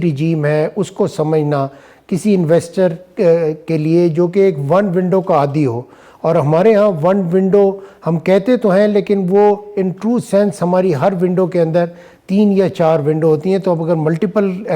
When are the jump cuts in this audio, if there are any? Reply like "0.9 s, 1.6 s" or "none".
none